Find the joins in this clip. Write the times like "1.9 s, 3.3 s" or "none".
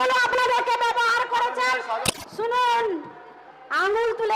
2.0 s